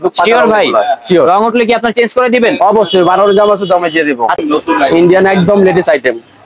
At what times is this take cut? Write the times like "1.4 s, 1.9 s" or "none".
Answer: 4.4 s